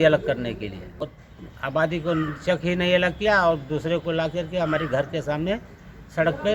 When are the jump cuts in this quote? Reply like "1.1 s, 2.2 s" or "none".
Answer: 1.0 s

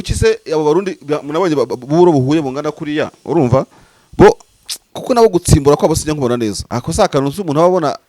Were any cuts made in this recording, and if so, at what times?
6.7 s

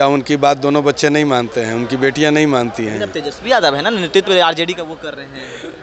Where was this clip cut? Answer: none

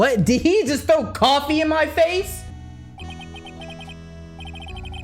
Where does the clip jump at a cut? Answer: 2.5 s

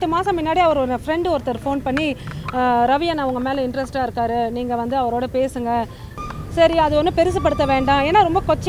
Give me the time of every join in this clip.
6.2 s

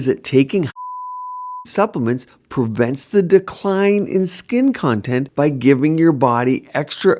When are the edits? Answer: 5.3 s

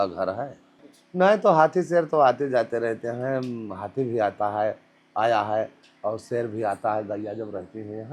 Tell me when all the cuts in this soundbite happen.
1.0 s

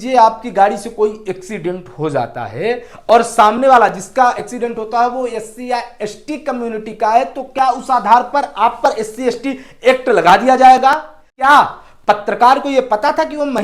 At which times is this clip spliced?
11.5 s

